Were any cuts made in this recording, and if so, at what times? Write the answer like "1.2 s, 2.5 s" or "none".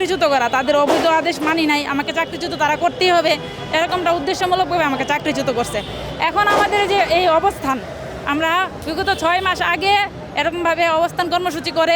none